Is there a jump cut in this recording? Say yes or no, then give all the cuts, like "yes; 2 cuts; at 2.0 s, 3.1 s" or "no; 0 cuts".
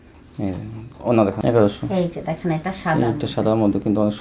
yes; 1 cut; at 1.4 s